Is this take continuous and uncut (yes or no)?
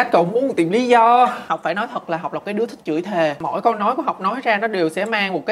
no